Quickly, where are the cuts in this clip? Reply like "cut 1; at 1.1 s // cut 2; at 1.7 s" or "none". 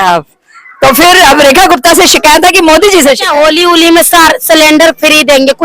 cut 1; at 3.2 s